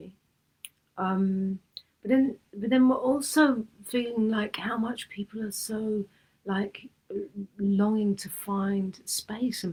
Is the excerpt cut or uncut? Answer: uncut